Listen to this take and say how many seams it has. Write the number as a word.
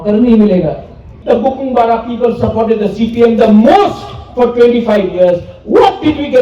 one